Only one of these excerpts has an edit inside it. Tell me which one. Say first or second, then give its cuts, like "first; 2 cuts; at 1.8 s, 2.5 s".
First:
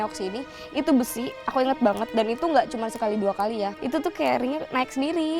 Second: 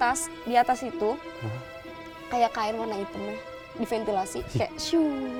first; 1 cut; at 3.8 s